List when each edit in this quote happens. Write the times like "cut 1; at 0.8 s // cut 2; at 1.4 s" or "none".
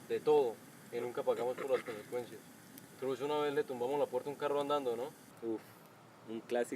cut 1; at 5.3 s